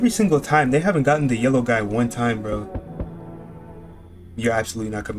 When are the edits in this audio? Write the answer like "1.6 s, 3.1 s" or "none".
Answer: none